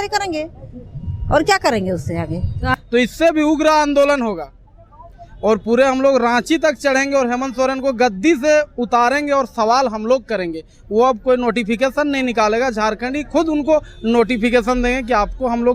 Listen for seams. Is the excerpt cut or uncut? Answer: cut